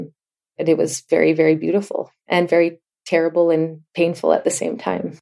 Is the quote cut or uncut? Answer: uncut